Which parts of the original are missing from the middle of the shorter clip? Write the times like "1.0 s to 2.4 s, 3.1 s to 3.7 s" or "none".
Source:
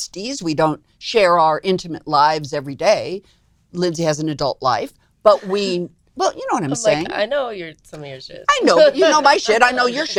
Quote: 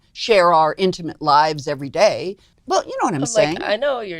3.4 s to 6.0 s